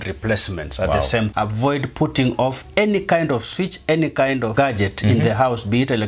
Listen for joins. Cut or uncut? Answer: cut